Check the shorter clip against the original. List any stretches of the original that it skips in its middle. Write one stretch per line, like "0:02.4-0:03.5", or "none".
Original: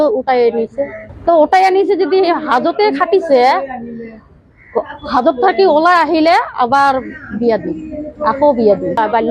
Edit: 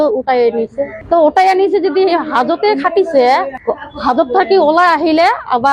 0:00.9-0:01.1
0:03.7-0:04.6